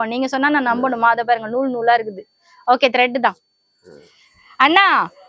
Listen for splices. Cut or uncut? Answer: uncut